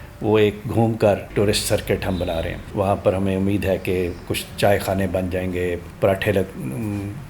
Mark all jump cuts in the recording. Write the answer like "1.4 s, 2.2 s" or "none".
1.3 s, 2.6 s, 5.9 s